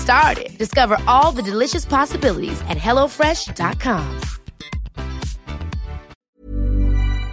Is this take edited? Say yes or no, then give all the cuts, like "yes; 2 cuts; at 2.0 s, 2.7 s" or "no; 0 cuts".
yes; 1 cut; at 6.3 s